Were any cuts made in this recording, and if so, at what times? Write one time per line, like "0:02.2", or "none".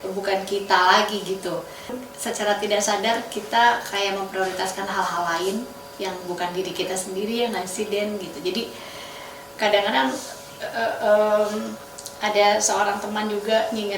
0:02.0